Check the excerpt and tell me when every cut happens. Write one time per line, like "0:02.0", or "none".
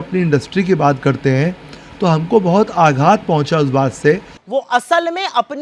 0:04.3